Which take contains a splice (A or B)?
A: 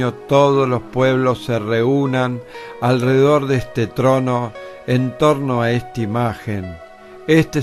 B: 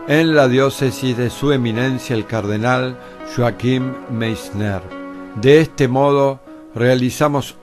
B